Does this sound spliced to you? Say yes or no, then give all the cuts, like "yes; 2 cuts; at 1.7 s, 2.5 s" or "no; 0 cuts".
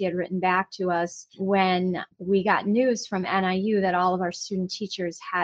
yes; 2 cuts; at 1.3 s, 2.1 s